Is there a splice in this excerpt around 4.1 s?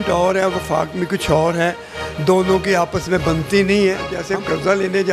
yes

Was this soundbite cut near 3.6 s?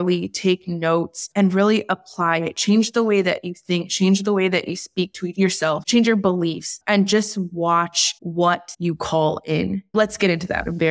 no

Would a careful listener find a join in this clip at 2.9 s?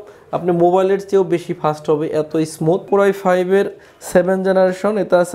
yes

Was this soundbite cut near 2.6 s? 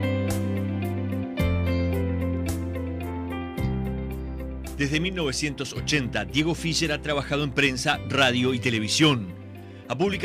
no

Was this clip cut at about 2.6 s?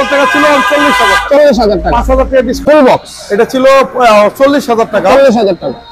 yes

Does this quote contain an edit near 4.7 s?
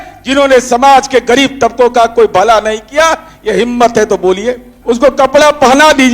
yes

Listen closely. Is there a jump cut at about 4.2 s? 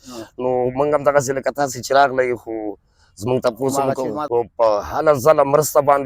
yes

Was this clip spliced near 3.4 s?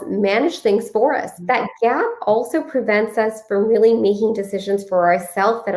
no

